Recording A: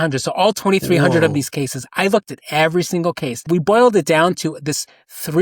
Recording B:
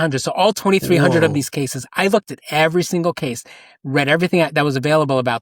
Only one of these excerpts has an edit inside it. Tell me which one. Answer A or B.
A